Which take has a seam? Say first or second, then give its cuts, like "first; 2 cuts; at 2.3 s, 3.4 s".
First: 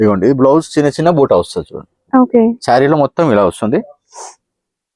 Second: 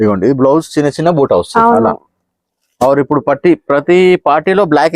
second; 1 cut; at 1.5 s